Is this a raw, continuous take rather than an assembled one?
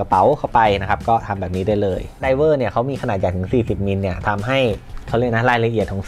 no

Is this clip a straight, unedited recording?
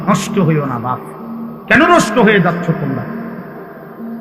no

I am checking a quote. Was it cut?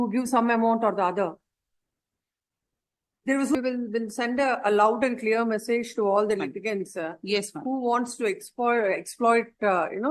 yes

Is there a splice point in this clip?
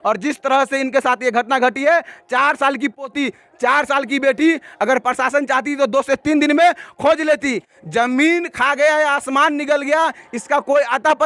no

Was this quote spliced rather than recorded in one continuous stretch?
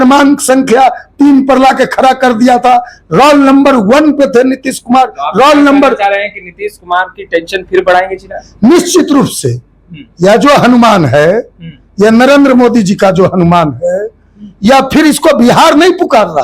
no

